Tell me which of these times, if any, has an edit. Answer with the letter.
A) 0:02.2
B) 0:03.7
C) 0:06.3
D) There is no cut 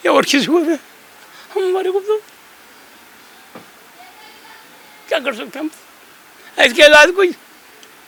D